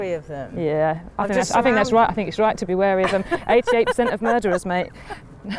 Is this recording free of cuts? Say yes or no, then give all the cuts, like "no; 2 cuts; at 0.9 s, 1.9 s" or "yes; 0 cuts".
yes; 0 cuts